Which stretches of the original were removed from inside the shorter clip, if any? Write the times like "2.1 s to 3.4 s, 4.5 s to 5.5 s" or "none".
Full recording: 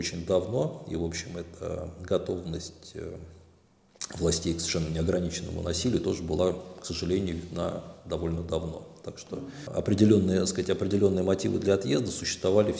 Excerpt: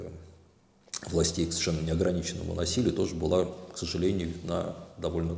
none